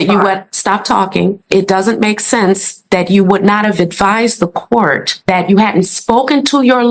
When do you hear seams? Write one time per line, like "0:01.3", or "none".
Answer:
none